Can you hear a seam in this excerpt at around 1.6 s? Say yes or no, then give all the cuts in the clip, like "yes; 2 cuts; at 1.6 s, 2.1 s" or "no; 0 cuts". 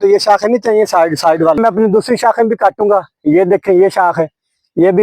yes; 1 cut; at 1.6 s